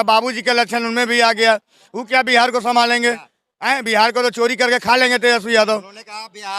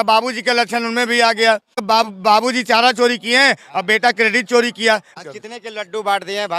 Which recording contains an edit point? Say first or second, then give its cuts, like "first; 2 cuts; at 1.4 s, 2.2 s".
second; 2 cuts; at 1.8 s, 5.1 s